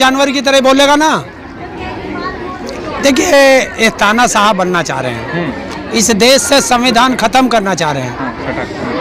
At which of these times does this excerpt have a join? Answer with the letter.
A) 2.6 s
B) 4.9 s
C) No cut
A